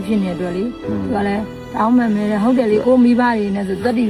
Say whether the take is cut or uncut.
uncut